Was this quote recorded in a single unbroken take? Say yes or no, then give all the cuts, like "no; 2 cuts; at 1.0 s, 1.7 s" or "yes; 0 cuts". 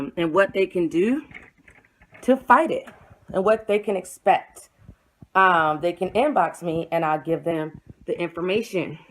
no; 1 cut; at 2.7 s